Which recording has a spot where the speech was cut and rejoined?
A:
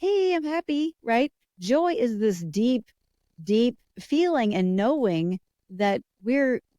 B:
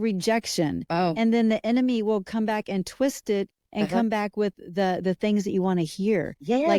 A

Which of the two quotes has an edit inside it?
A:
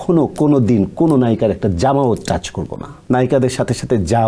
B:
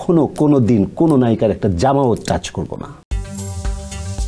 A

